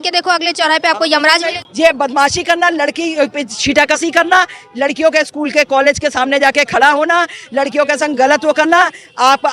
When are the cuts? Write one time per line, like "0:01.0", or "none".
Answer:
0:01.6